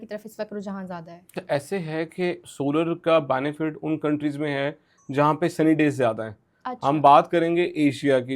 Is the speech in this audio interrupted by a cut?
yes; 1 cut; at 1.4 s

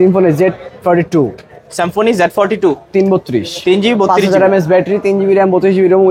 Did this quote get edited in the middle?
no; 0 cuts

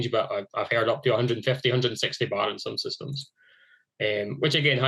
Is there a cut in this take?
no; 0 cuts

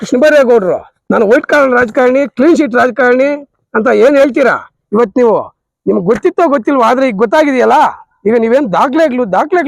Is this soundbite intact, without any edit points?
no; 1 cut; at 0.9 s

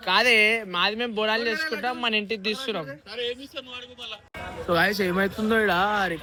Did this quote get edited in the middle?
no; 0 cuts

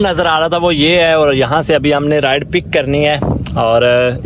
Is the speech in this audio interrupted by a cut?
no; 0 cuts

